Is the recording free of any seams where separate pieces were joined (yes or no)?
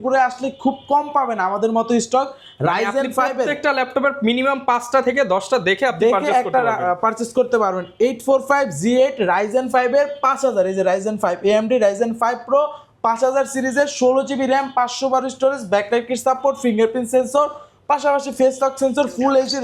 yes